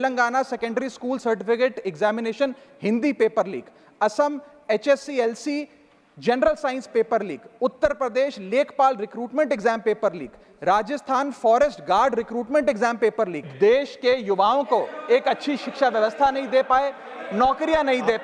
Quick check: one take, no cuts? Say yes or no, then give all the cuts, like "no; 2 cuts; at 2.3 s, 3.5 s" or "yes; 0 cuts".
no; 1 cut; at 13.4 s